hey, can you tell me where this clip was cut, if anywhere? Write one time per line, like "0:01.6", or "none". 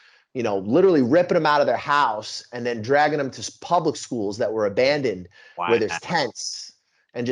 none